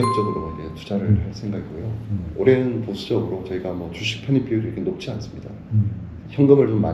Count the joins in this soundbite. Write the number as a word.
zero